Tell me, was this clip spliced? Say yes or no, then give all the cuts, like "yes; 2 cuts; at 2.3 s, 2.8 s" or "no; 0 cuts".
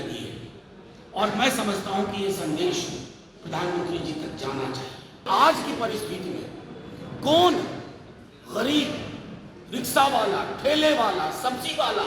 yes; 1 cut; at 5.2 s